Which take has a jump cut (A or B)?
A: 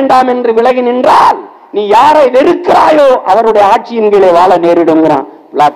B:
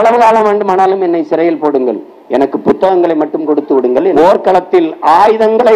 B